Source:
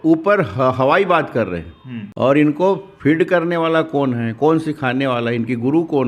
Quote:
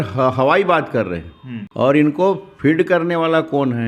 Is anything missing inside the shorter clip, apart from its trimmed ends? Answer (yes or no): no